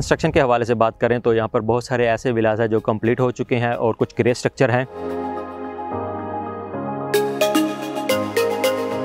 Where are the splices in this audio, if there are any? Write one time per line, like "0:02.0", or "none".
none